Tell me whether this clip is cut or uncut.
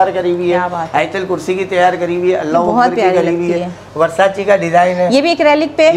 uncut